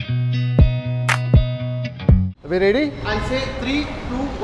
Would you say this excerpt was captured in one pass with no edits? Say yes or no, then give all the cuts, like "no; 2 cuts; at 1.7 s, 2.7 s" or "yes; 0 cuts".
yes; 0 cuts